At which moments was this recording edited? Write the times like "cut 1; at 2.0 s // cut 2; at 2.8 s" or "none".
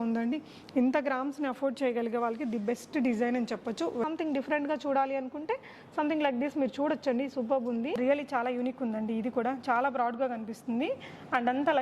cut 1; at 4.0 s // cut 2; at 8.0 s